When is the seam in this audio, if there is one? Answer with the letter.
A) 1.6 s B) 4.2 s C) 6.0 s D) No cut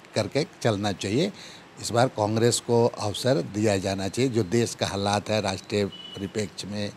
D